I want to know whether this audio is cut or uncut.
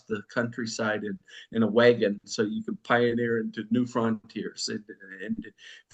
uncut